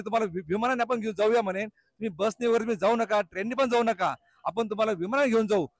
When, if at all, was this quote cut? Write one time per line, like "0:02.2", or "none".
none